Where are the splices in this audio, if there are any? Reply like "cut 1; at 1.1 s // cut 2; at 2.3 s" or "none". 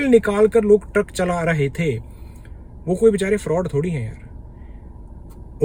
none